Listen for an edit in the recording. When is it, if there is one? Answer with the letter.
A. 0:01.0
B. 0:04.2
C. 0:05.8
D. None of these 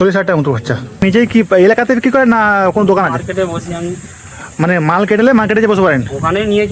A